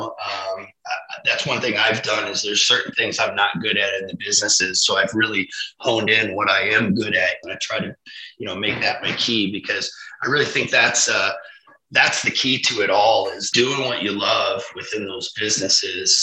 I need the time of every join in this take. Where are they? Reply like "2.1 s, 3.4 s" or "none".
7.4 s, 13.4 s